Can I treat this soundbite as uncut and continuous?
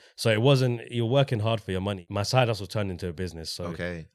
no; 1 cut; at 2.0 s

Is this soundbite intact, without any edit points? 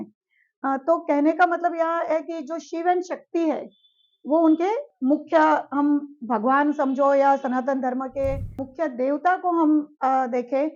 no; 1 cut; at 8.7 s

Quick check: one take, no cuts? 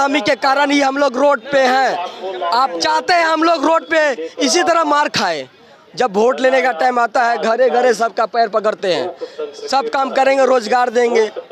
yes; 0 cuts

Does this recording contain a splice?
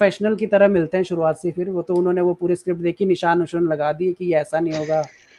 no; 0 cuts

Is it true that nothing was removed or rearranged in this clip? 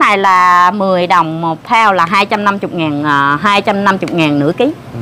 yes; 0 cuts

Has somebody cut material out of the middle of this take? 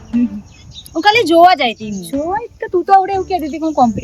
no; 0 cuts

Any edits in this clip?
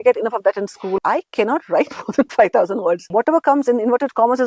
yes; 2 cuts; at 1.0 s, 3.0 s

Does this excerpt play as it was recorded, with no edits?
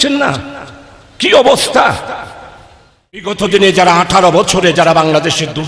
no; 1 cut; at 3.3 s

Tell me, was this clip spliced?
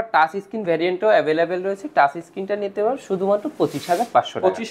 no; 0 cuts

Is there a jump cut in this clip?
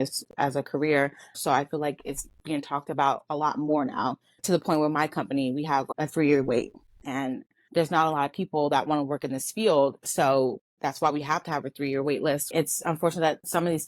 yes; 3 cuts; at 1.3 s, 7.0 s, 12.4 s

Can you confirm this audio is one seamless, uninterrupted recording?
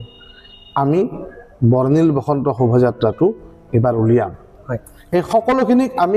yes; 0 cuts

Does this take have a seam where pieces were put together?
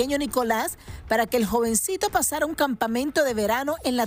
no; 0 cuts

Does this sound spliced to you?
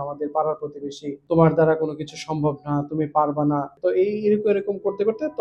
yes; 2 cuts; at 1.2 s, 3.7 s

